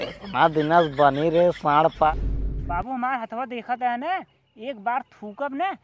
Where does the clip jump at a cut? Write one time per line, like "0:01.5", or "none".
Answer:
0:02.1